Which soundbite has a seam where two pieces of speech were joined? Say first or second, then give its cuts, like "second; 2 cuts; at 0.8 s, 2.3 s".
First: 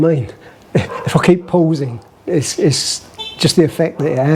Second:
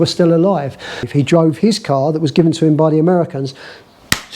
second; 1 cut; at 1.0 s